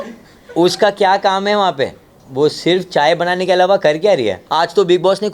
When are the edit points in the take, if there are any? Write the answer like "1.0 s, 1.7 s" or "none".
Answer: 4.4 s